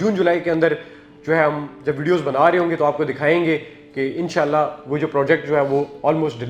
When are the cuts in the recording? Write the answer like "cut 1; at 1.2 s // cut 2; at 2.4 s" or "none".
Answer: none

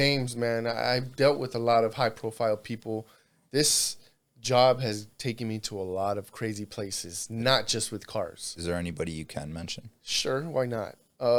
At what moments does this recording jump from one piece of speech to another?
none

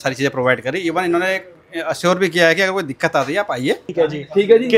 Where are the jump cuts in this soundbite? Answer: cut 1; at 3.9 s

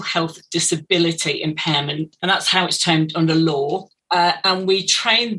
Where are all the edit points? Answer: cut 1; at 2.1 s // cut 2; at 3.9 s

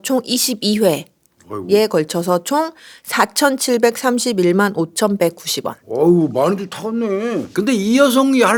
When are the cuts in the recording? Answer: none

